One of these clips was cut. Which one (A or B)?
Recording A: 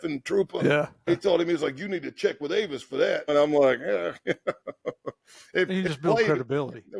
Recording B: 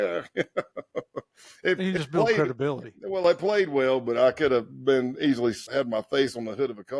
B